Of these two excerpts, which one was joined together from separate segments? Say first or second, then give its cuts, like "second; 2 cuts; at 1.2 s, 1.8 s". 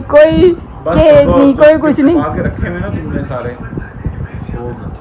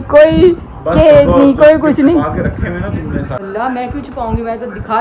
second; 1 cut; at 3.4 s